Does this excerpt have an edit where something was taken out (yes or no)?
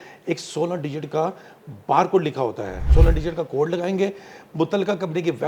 yes